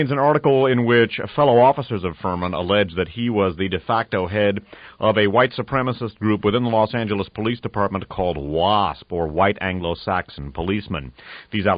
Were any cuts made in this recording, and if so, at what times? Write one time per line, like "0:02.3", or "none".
0:04.1